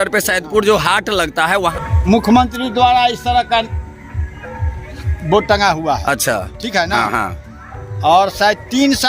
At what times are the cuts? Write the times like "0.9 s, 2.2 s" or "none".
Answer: 1.8 s